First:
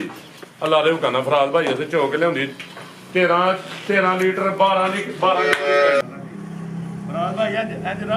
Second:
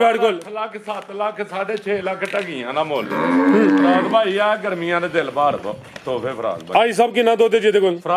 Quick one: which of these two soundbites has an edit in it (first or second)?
first